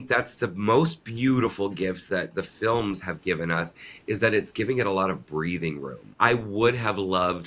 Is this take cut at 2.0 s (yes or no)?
yes